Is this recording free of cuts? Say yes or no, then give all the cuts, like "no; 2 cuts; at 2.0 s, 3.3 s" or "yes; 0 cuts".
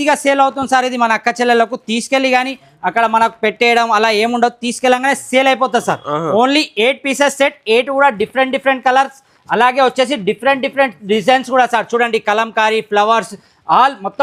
yes; 0 cuts